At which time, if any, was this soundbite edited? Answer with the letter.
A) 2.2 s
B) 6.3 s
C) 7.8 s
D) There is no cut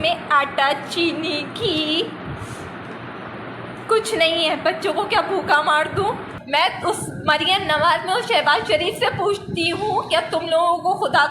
B